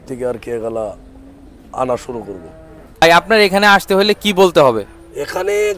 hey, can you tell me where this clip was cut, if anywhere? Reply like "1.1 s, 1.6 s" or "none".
3.0 s